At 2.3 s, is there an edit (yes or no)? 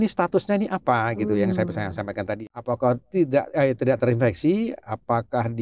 yes